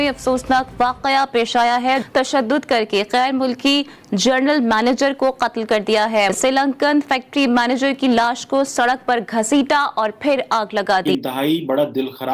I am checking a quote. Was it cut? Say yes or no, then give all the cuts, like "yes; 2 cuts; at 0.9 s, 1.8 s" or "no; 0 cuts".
yes; 3 cuts; at 2.0 s, 6.3 s, 11.1 s